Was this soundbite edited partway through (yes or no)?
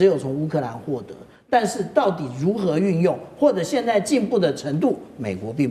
no